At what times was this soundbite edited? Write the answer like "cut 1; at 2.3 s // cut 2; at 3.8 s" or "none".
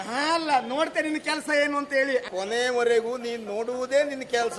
cut 1; at 2.3 s